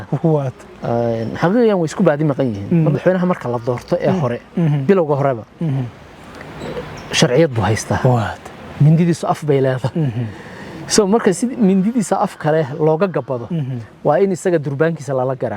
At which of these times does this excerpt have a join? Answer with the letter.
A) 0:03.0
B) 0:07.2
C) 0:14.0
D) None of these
A